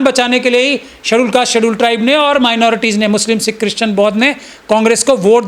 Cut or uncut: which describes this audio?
uncut